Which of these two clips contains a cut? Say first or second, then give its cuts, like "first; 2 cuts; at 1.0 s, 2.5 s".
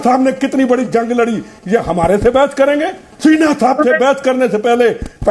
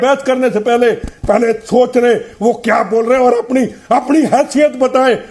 first; 1 cut; at 3.1 s